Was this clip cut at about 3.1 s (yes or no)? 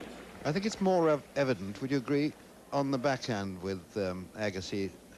no